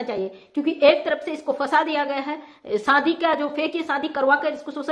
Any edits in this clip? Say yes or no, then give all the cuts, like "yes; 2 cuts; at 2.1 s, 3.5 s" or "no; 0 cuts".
no; 0 cuts